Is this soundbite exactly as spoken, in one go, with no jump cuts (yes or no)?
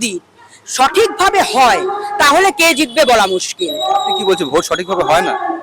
yes